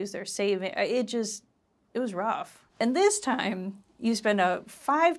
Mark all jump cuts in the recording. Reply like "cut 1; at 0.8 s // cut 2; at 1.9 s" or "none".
cut 1; at 2.6 s